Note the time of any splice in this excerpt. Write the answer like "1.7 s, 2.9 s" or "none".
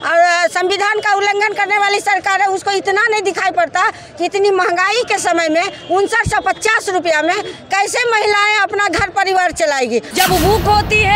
10.1 s